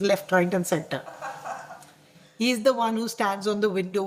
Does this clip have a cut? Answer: no; 0 cuts

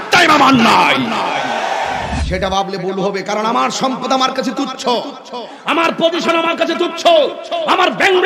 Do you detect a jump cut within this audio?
yes; 1 cut; at 2.2 s

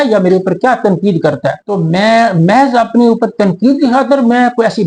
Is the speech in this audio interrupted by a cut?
yes; 1 cut; at 1.7 s

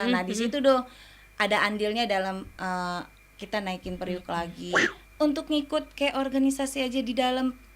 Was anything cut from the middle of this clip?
yes; 1 cut; at 4.8 s

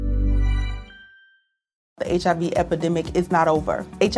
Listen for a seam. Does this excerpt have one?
yes; 1 cut; at 1.9 s

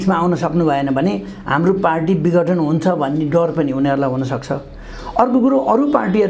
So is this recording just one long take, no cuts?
yes; 0 cuts

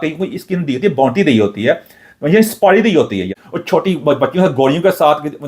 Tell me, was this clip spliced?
yes; 1 cut; at 3.4 s

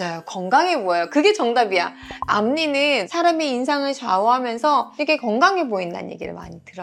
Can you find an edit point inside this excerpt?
no; 0 cuts

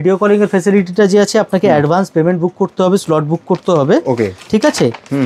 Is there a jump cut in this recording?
no; 0 cuts

